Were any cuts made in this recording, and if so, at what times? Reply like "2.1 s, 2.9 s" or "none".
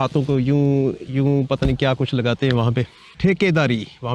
3.0 s

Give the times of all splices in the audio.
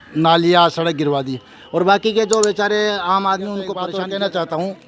3.9 s

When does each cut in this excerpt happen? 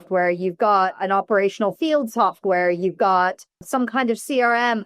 1.0 s, 3.6 s

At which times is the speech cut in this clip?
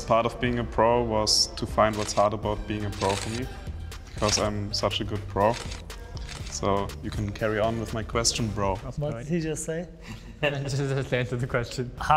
none

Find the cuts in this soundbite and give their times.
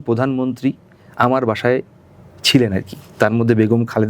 none

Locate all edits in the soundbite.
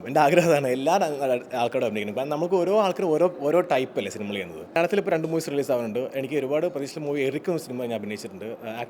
4.8 s

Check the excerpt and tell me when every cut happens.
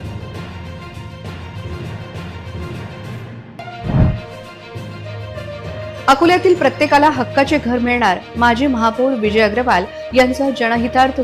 3.5 s

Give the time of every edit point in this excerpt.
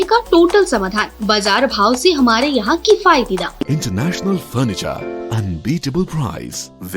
3.7 s

